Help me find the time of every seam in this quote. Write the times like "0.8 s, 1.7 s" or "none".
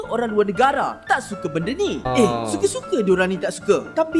2.1 s